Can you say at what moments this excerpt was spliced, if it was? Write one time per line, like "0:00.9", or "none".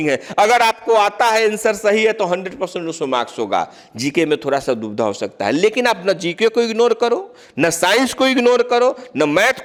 none